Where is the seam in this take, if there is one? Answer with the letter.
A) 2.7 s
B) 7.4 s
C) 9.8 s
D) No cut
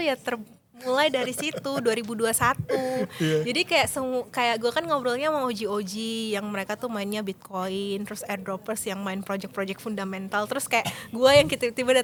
D